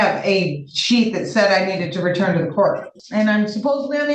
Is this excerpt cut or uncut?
cut